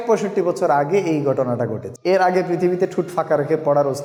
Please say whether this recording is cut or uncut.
uncut